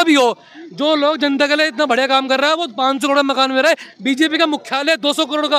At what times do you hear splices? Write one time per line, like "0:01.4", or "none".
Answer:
none